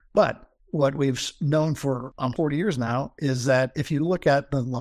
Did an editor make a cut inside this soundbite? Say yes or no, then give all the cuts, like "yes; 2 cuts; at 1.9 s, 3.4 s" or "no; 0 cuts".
no; 0 cuts